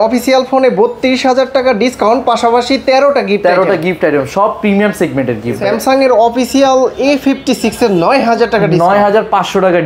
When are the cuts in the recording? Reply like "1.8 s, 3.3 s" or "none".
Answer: 5.6 s